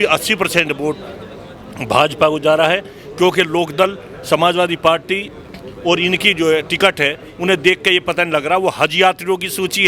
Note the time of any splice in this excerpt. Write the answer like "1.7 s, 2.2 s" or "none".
none